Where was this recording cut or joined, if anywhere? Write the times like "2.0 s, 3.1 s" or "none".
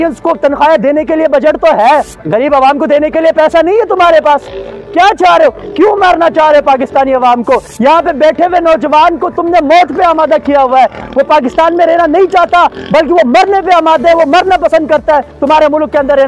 2.2 s